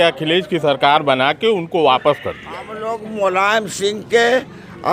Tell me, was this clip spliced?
yes; 1 cut; at 2.8 s

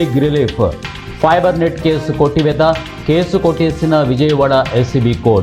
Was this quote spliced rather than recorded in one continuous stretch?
no; 0 cuts

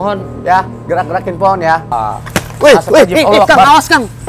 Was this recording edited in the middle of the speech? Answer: yes; 1 cut; at 1.9 s

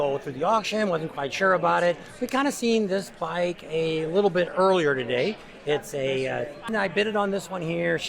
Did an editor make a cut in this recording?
yes; 1 cut; at 6.7 s

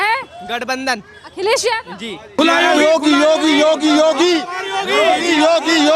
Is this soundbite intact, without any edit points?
no; 1 cut; at 2.4 s

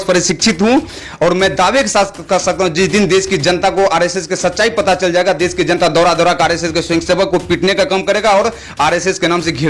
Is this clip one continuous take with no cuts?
yes; 0 cuts

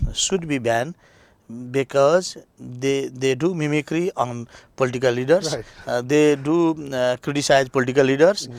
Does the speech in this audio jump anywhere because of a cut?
no; 0 cuts

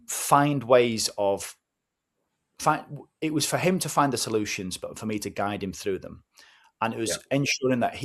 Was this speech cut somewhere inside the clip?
no; 0 cuts

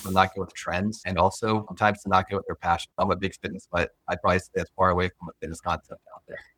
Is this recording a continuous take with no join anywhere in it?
yes; 0 cuts

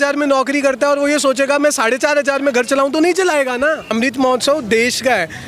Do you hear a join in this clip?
yes; 1 cut; at 3.9 s

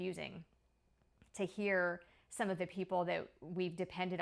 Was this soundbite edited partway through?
no; 0 cuts

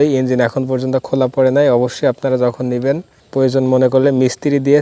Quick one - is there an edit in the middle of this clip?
no; 0 cuts

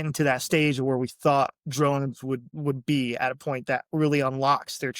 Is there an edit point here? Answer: yes; 1 cut; at 2.5 s

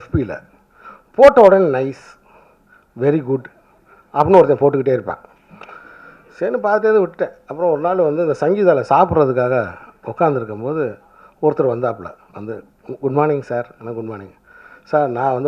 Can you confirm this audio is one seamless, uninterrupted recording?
yes; 0 cuts

